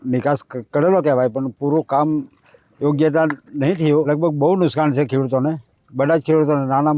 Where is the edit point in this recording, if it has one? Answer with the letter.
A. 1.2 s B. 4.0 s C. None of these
B